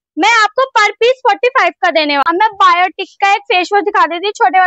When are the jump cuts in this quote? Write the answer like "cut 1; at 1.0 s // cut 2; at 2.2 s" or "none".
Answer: cut 1; at 2.2 s